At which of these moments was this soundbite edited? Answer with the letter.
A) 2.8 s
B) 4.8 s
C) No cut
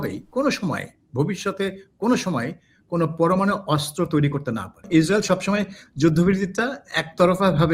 B